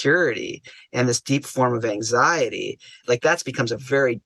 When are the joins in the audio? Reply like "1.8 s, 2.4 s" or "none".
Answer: 3.0 s